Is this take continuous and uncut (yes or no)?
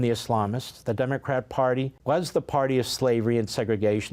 no